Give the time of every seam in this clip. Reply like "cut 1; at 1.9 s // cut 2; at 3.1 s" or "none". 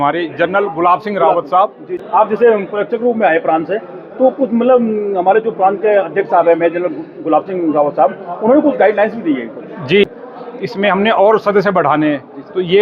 cut 1; at 2.0 s // cut 2; at 10.1 s